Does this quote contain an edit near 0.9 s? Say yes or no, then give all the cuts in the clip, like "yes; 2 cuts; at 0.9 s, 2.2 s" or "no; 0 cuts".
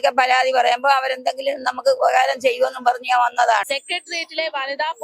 no; 1 cut; at 3.8 s